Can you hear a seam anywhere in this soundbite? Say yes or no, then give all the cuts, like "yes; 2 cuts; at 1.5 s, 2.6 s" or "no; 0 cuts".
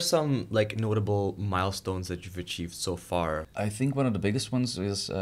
yes; 1 cut; at 3.5 s